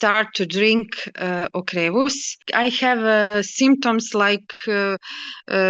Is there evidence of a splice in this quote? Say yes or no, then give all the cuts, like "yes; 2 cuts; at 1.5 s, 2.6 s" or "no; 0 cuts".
yes; 1 cut; at 2.4 s